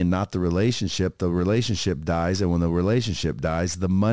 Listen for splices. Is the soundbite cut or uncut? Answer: uncut